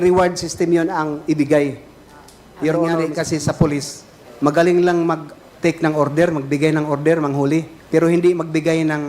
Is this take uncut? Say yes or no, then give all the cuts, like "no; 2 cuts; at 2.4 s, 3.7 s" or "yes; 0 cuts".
no; 1 cut; at 3.0 s